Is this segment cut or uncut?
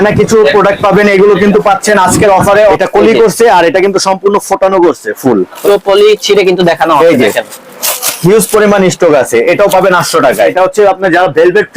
cut